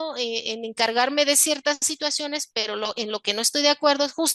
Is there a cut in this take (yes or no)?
no